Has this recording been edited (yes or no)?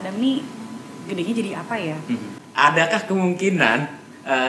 yes